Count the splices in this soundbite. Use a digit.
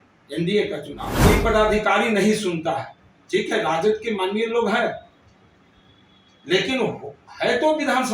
1